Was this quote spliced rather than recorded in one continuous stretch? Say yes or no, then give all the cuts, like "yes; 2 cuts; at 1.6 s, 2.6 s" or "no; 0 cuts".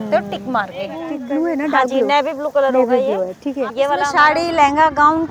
yes; 2 cuts; at 1.1 s, 4.1 s